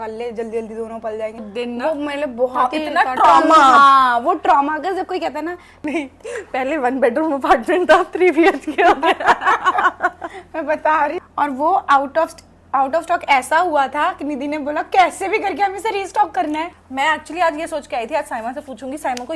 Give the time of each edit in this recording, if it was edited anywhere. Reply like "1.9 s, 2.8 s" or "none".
1.4 s, 5.8 s, 11.2 s, 16.8 s

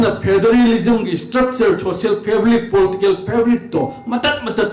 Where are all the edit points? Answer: none

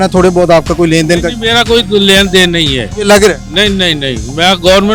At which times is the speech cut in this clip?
none

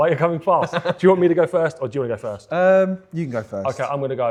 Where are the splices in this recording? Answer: none

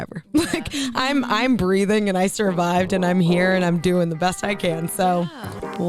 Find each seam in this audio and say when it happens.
none

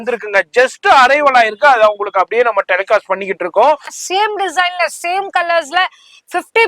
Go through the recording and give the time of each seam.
3.9 s

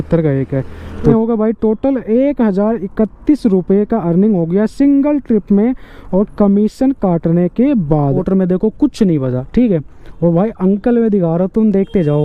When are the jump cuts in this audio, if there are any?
1.1 s, 8.2 s

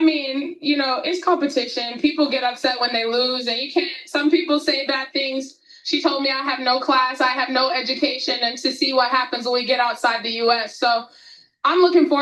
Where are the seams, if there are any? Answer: none

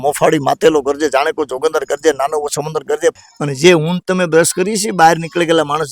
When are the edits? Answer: 3.2 s

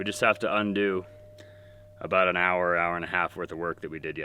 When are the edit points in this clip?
none

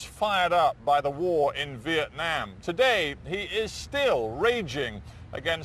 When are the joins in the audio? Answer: 2.8 s

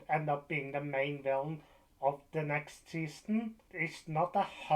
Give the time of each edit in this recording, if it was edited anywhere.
3.6 s

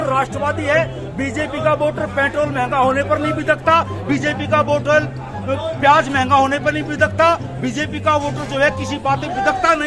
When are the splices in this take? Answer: none

